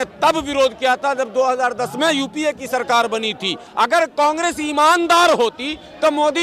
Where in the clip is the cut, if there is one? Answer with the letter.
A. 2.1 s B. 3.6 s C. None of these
B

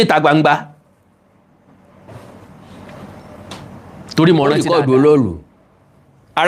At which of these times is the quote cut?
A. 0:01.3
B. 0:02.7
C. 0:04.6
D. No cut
C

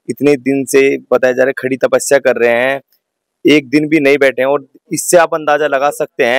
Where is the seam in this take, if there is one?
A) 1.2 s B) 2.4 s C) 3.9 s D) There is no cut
D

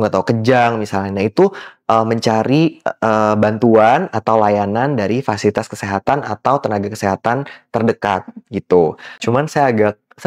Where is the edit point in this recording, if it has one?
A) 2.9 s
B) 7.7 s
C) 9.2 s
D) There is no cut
C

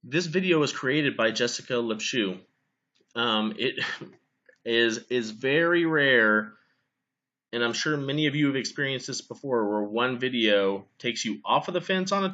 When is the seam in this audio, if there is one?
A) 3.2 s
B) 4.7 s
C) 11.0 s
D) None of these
D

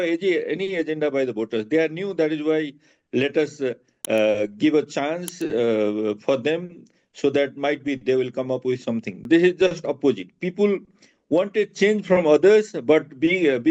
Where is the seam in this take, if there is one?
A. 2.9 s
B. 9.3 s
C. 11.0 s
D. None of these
B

